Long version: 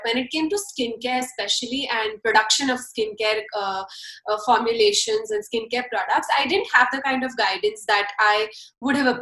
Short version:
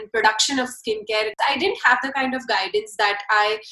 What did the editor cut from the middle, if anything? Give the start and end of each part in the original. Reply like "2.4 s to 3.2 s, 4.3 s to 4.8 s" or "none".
3.5 s to 6.2 s

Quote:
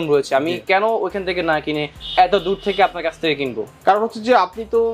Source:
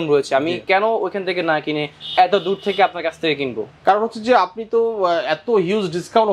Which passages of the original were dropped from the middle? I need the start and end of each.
none

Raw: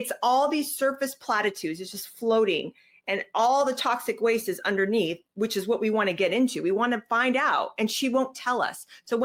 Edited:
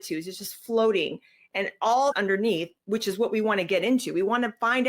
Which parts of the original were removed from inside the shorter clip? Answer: 3.7 s to 4.6 s

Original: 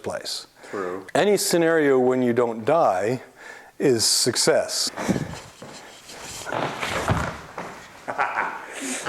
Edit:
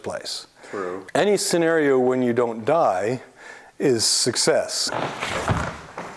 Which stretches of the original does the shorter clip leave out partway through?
4.8 s to 6.4 s

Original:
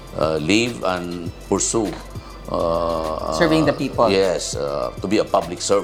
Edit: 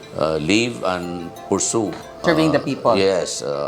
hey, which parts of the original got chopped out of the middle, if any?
2.2 s to 3.3 s

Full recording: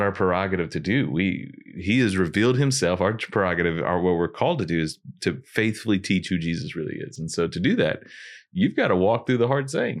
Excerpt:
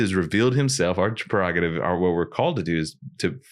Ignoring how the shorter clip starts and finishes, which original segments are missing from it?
none

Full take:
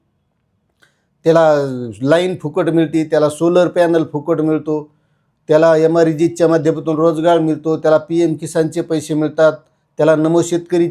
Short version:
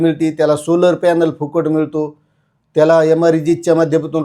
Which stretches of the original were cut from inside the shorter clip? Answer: none

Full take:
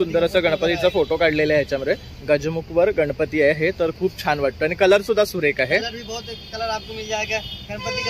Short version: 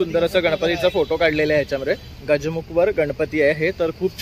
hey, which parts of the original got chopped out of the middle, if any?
none

